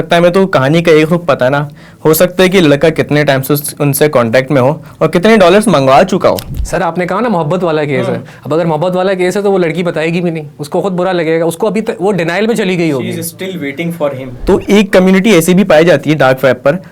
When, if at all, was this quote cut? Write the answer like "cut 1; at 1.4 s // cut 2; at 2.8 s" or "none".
cut 1; at 14.3 s